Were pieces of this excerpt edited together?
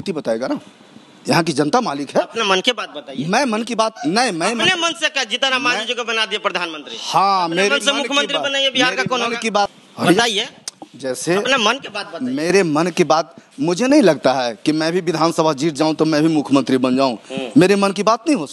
no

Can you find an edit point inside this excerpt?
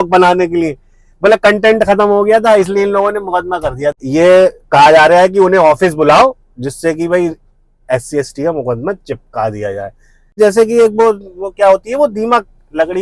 yes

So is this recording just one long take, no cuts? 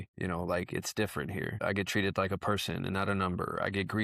yes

